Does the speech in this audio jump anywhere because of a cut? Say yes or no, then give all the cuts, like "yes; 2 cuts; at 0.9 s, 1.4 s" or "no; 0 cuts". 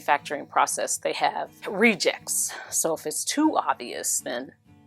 yes; 1 cut; at 1.6 s